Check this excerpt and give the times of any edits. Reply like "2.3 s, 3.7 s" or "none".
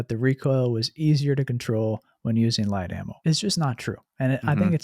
3.1 s